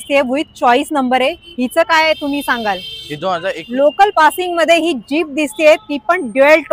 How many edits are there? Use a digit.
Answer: 1